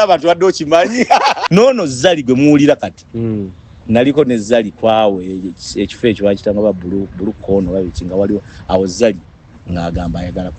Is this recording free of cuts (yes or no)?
no